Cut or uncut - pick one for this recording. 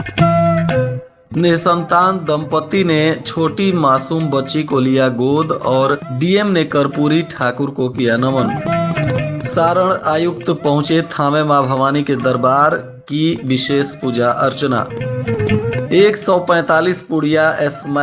cut